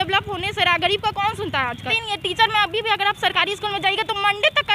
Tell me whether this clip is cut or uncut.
cut